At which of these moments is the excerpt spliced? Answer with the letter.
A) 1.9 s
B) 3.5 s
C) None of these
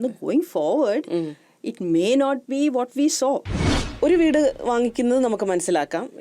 B